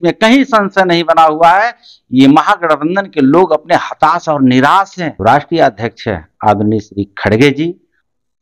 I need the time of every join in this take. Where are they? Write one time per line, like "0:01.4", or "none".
0:05.1